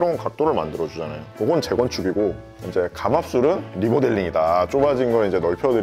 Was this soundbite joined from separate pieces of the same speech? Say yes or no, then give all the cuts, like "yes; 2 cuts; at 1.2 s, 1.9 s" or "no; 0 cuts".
yes; 1 cut; at 1.3 s